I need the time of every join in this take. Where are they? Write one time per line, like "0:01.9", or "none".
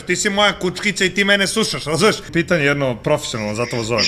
0:02.2

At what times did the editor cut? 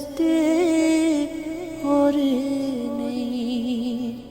0:01.7

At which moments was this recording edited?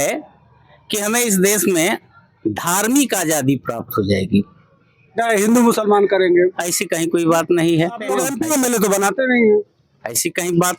0:08.2

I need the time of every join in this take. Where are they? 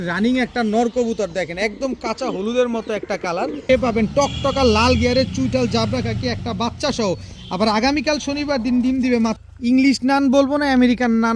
0:03.6
0:09.4

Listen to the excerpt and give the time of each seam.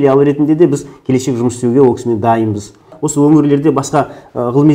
0:02.9

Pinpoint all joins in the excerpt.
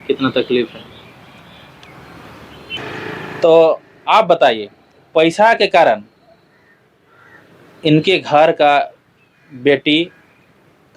none

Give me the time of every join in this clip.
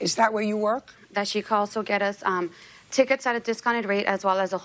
0:01.0

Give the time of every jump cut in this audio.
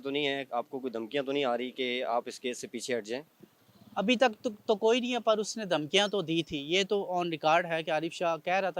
none

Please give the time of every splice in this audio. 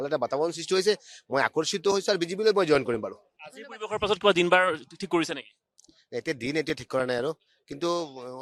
none

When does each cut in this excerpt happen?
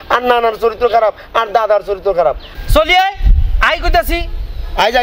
0:02.5

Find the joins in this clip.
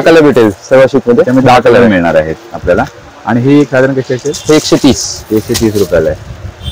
none

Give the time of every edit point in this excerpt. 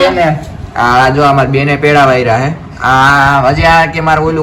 none

